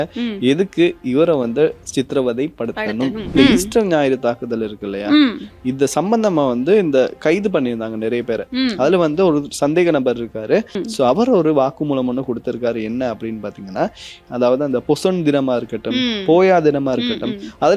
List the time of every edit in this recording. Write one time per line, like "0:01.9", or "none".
0:03.3
0:10.8
0:14.2